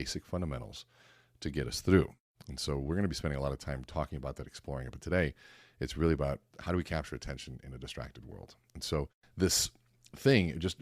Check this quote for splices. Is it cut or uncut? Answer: cut